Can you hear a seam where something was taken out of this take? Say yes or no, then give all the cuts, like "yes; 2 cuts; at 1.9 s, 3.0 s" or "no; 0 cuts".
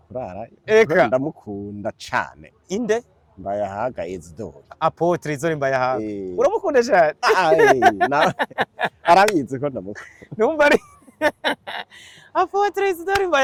no; 0 cuts